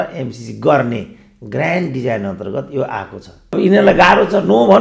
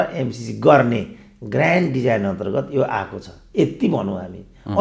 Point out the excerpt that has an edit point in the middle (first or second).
first